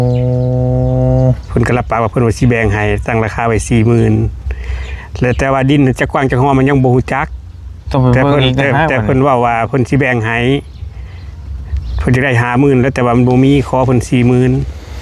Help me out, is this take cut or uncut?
uncut